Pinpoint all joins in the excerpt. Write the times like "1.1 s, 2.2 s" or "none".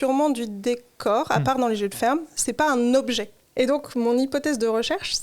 3.3 s